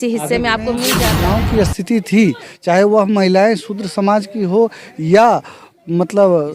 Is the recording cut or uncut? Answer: cut